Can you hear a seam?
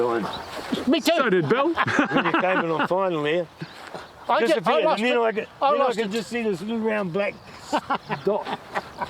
no; 0 cuts

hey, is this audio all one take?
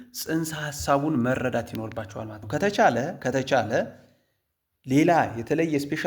no; 1 cut; at 2.4 s

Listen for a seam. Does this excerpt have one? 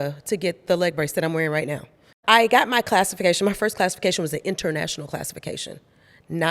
yes; 1 cut; at 2.1 s

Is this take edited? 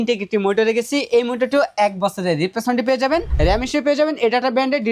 yes; 1 cut; at 3.3 s

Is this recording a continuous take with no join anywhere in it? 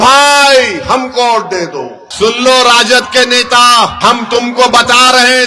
no; 2 cuts; at 2.0 s, 3.9 s

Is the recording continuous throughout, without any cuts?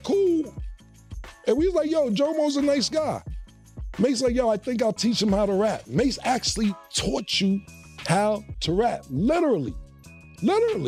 yes; 0 cuts

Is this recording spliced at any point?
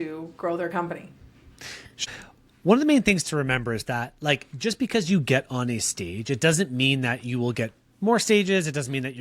yes; 1 cut; at 2.0 s

